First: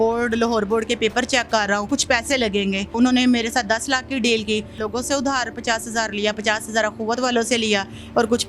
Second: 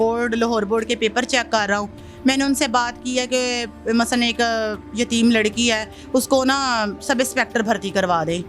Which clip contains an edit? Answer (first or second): first